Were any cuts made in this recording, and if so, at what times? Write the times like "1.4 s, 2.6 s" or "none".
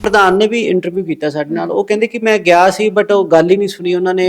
none

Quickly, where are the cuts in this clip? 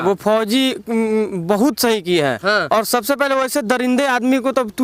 none

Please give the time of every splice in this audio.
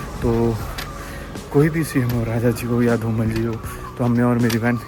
none

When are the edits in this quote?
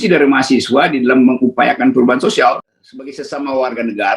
3.0 s

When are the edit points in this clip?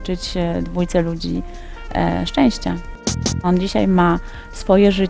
3.0 s

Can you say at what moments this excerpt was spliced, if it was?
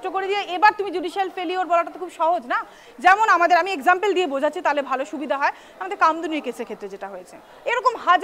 none

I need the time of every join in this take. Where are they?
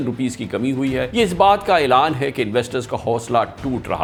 none

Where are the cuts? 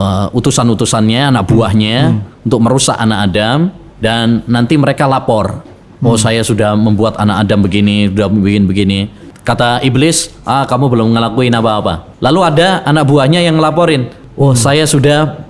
3.9 s, 9.3 s, 12.0 s, 14.2 s

